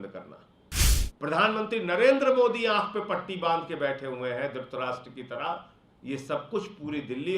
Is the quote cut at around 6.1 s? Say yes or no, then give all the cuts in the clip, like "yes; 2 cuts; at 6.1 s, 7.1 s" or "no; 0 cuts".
no; 1 cut; at 1.0 s